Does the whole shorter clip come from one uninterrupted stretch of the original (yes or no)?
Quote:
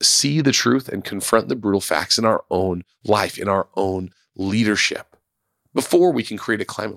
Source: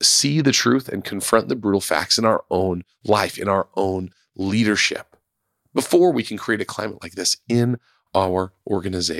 yes